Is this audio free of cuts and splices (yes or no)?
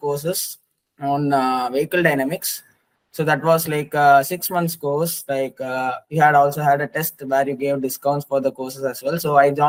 yes